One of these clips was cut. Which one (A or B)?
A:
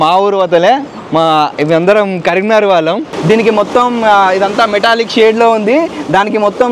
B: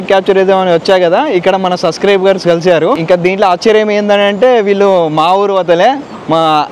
A